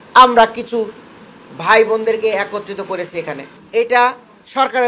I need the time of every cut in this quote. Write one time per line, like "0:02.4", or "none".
0:03.5